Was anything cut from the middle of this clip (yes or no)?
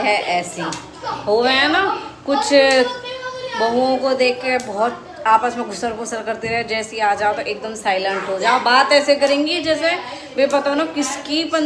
no